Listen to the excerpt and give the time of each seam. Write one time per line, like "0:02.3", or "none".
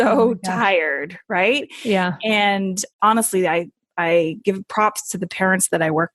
0:02.8

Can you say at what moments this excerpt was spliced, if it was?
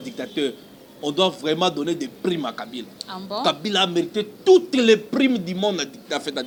none

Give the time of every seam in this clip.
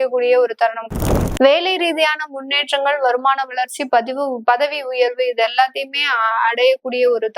0:00.9

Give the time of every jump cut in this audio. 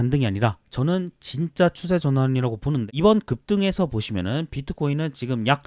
0:02.9

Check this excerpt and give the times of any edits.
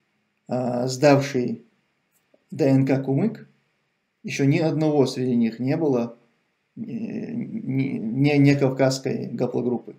none

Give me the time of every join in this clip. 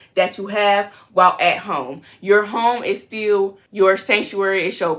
0:03.6

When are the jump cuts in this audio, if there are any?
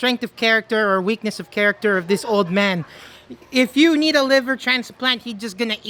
none

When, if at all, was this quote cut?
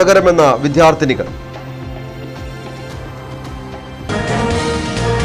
0:04.0

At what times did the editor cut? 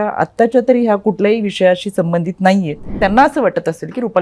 0:02.9

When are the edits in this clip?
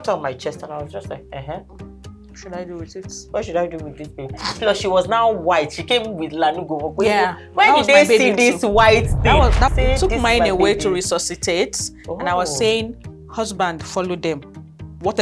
0:09.7

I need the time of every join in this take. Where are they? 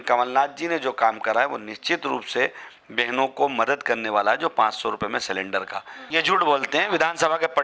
0:06.1

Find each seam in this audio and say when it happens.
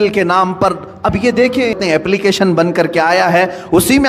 0:01.8

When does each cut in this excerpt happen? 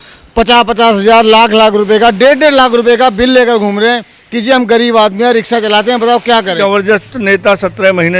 0:06.5

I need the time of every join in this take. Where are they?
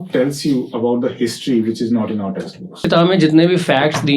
0:02.8

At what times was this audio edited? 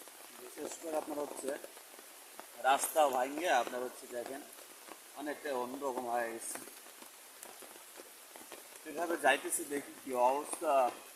none

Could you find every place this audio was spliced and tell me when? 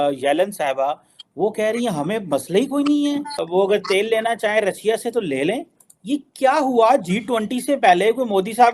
none

